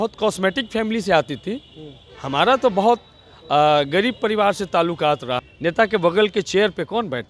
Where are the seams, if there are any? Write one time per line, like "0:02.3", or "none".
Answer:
0:05.4